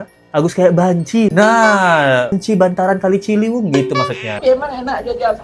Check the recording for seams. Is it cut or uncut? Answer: cut